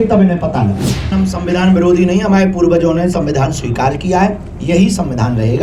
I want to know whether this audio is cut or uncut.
cut